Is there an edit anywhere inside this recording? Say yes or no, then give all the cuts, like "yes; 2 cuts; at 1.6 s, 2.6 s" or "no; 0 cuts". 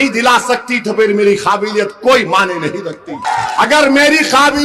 yes; 1 cut; at 3.2 s